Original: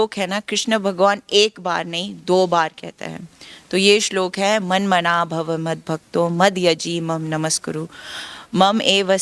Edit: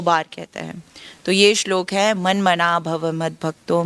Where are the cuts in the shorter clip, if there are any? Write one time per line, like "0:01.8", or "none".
none